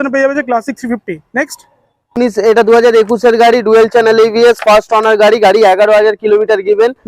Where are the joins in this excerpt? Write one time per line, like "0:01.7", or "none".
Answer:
0:02.2